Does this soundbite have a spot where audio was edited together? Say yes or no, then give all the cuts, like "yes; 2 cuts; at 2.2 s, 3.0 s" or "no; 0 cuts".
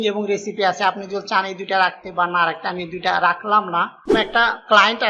yes; 1 cut; at 4.1 s